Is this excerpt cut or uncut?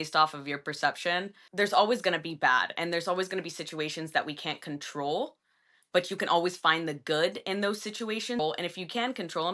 cut